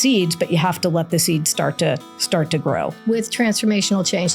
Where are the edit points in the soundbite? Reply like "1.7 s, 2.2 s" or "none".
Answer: 3.0 s